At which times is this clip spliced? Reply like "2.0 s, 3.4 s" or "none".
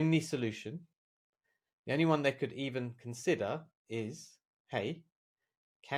none